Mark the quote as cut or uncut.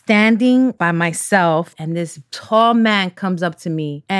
cut